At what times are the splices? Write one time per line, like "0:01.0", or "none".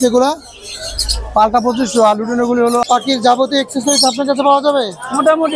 0:02.8